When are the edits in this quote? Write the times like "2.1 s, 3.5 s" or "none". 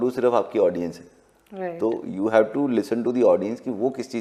none